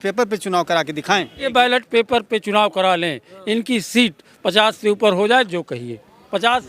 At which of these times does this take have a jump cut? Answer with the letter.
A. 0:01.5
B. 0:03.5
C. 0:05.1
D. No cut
A